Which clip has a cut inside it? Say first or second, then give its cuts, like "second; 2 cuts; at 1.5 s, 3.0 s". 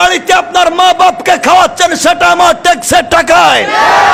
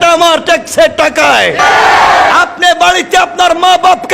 second; 1 cut; at 1.6 s